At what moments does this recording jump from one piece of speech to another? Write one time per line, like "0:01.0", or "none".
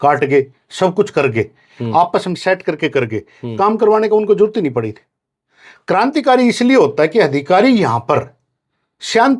none